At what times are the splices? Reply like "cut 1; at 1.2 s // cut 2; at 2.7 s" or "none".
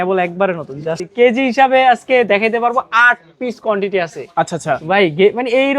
cut 1; at 1.0 s